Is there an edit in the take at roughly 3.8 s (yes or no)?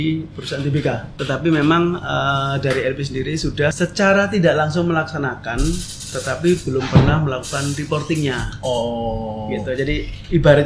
yes